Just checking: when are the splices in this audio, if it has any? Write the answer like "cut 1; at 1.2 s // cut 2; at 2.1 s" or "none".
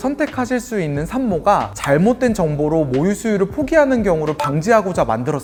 none

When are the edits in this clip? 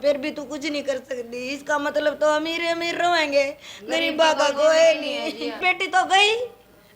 cut 1; at 5.6 s

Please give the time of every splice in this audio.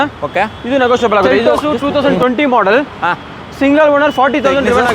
cut 1; at 1.7 s

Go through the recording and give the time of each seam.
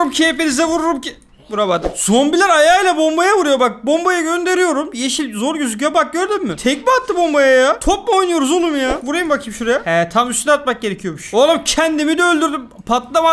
cut 1; at 1.9 s // cut 2; at 9.0 s

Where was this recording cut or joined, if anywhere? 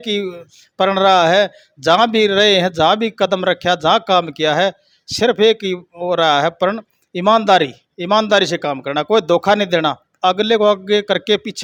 none

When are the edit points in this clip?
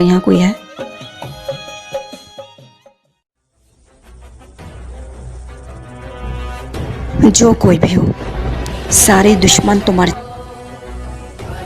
cut 1; at 10.2 s

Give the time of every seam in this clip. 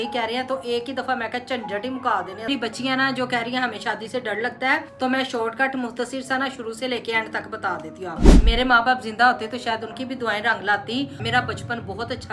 cut 1; at 2.5 s // cut 2; at 4.9 s // cut 3; at 8.4 s // cut 4; at 11.2 s

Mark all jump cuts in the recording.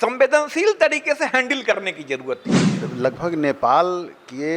cut 1; at 2.8 s

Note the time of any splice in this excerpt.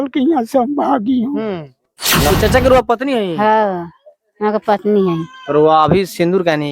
cut 1; at 2.3 s

